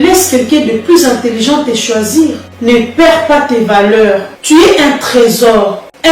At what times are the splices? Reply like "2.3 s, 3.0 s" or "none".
4.3 s